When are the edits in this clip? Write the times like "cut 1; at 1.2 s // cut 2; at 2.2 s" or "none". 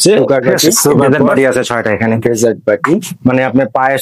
cut 1; at 1.1 s